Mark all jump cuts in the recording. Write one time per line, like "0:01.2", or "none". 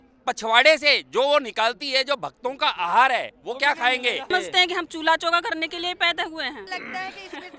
0:04.3
0:06.6